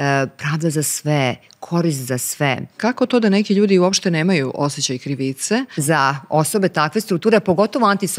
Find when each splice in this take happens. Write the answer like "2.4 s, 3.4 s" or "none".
2.7 s, 5.7 s